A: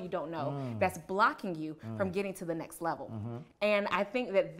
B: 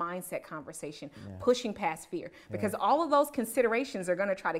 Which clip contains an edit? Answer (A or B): A